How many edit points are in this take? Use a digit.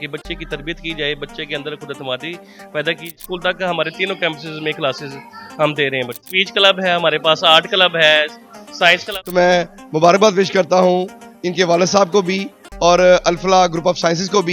3